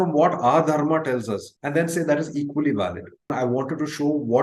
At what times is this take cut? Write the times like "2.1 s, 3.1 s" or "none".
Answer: 3.3 s